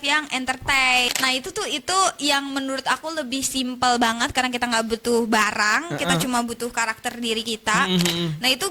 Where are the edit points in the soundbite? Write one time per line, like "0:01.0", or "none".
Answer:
0:01.1